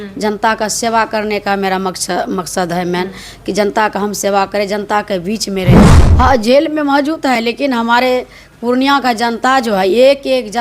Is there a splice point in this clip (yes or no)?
yes